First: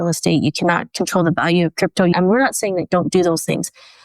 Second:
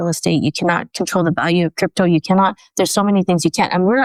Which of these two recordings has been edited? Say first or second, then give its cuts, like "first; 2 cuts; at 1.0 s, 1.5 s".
first; 1 cut; at 2.1 s